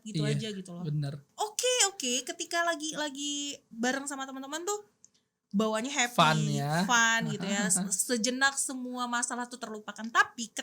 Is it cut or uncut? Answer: cut